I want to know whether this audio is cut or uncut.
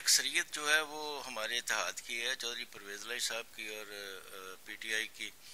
uncut